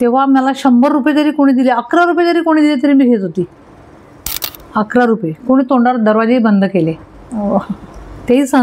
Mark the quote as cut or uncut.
uncut